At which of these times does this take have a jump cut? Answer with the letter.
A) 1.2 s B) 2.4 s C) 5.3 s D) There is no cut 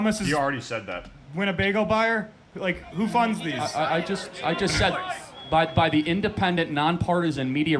B